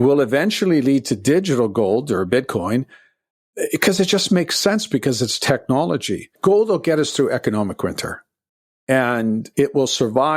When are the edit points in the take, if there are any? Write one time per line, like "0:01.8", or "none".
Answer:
0:06.3